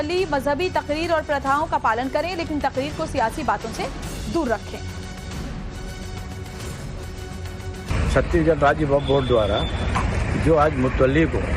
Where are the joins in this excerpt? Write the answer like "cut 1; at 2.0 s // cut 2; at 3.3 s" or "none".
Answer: cut 1; at 2.6 s